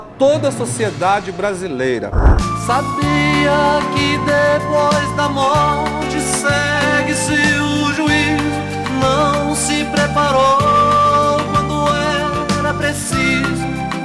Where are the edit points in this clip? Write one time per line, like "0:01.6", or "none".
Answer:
0:02.3

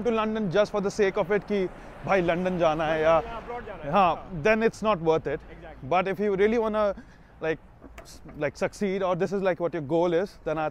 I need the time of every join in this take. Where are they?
none

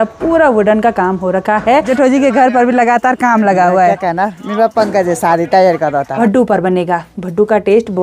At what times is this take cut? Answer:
0:01.9
0:06.1

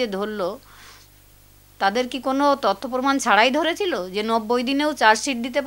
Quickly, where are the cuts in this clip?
none

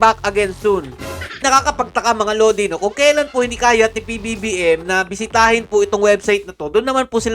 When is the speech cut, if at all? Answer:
0:01.4

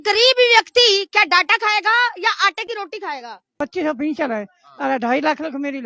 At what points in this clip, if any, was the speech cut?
0:03.5

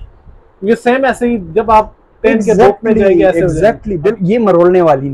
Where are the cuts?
0:04.2

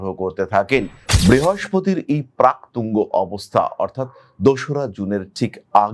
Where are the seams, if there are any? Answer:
0:01.0

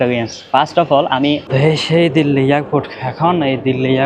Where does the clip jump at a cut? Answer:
0:01.4

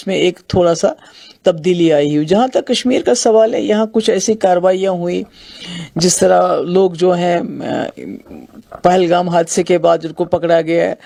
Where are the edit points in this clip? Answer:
none

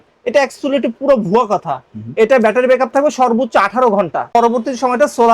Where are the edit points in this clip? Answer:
0:04.3

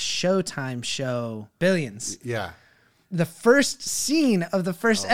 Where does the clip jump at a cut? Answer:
0:01.6
0:03.0

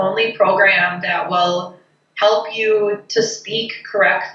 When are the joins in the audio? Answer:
none

